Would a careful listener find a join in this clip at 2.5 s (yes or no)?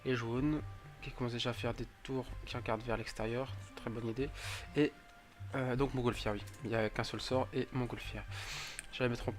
no